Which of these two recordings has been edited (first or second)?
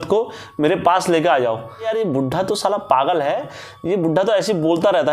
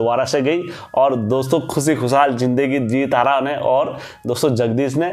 first